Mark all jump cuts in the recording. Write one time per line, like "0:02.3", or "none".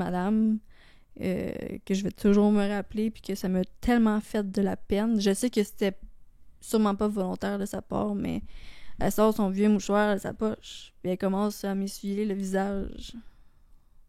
none